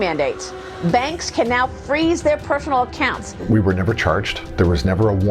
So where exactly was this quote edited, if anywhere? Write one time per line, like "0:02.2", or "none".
0:03.3
0:04.4